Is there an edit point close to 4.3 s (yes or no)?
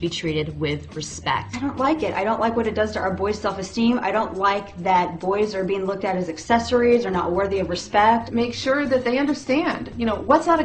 no